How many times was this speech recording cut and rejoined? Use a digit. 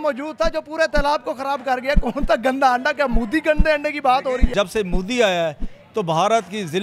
1